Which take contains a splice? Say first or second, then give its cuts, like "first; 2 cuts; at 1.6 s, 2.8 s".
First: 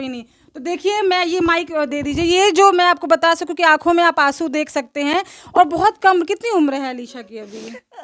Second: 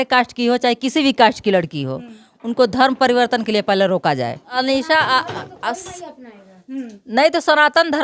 second; 1 cut; at 4.5 s